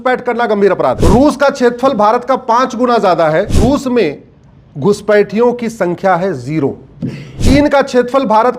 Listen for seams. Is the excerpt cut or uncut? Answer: cut